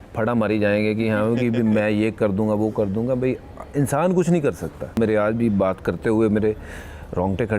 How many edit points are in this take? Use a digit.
1